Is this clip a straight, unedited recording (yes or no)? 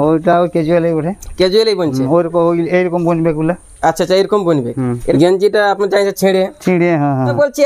no